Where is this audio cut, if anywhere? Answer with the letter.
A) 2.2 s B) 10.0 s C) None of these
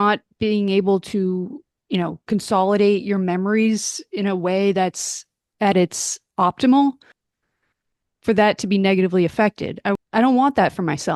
B